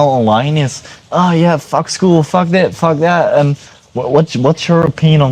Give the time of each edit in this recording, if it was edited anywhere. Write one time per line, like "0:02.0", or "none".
none